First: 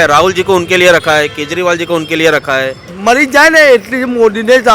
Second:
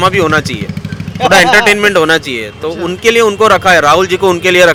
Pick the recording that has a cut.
first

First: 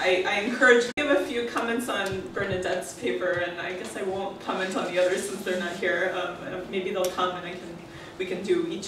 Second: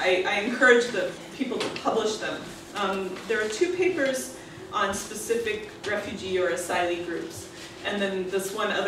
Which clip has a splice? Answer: second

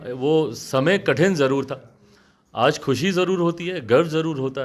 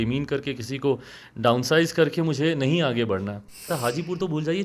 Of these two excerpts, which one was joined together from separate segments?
second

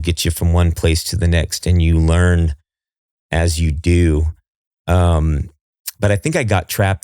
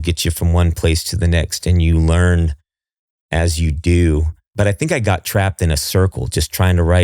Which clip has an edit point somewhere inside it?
second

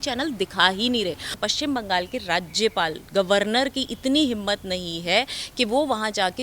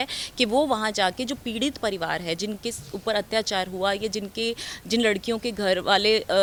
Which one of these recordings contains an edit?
first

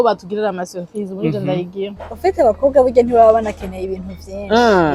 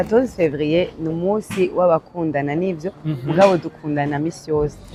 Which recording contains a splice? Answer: first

